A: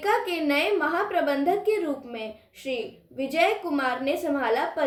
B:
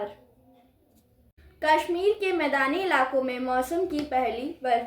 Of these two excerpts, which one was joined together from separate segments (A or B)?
B